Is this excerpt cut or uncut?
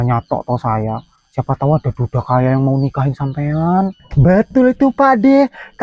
cut